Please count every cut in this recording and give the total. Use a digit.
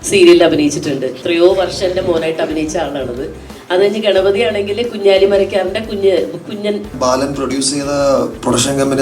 2